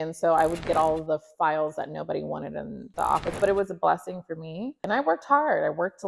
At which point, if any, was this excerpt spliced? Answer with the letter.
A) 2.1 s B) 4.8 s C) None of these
B